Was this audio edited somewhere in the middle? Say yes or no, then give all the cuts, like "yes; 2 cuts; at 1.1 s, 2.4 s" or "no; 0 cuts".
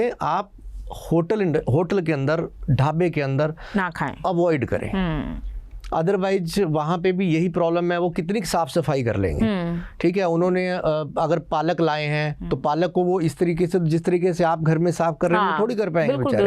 no; 0 cuts